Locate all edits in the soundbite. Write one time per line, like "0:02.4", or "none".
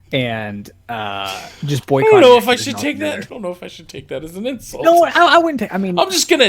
0:03.3